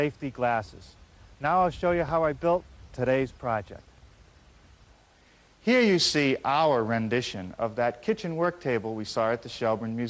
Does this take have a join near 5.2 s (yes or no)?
no